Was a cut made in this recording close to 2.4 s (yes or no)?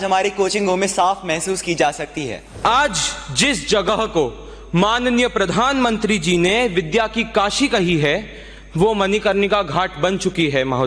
yes